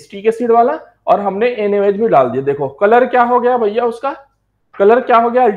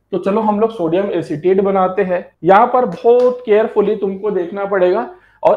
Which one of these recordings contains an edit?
second; 1 cut; at 2.3 s

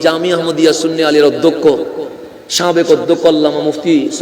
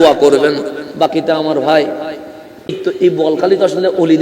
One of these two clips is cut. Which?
second; 1 cut; at 2.7 s

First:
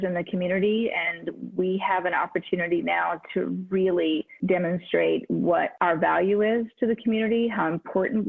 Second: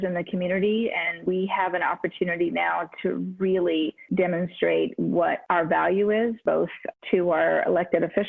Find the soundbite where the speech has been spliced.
second; 2 cuts; at 1.1 s, 6.4 s

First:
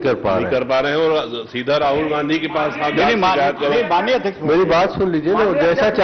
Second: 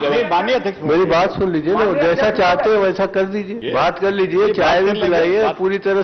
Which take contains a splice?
second; 1 cut; at 3.6 s

